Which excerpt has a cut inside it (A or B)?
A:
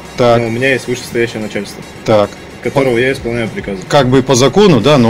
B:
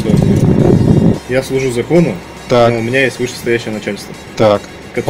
B